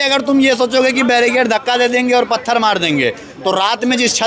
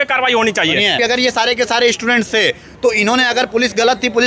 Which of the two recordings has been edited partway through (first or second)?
second